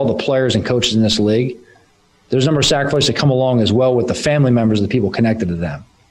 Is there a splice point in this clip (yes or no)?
yes